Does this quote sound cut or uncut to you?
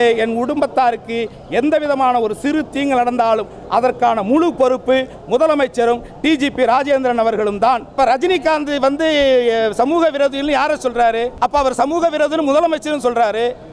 cut